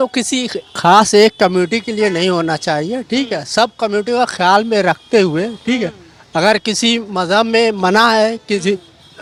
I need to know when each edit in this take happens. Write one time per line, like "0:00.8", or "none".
none